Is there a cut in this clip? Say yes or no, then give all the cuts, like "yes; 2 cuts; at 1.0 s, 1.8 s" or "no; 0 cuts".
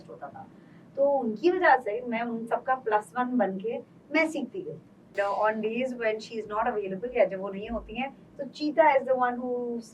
yes; 1 cut; at 5.1 s